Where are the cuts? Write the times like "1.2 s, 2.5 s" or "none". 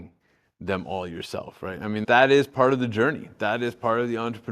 2.0 s